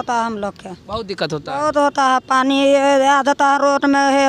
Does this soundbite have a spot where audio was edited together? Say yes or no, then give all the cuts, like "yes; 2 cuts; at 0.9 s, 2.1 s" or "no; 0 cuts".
no; 0 cuts